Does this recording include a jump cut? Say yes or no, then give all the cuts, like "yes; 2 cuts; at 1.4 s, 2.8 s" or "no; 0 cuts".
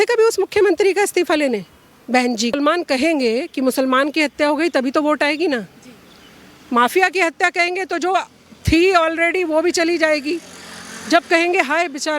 yes; 1 cut; at 2.5 s